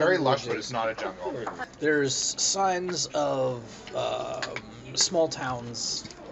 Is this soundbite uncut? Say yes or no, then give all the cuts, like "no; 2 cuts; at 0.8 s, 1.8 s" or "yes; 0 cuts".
no; 1 cut; at 1.7 s